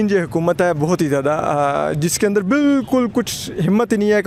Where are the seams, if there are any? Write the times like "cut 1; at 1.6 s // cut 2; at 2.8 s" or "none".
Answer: none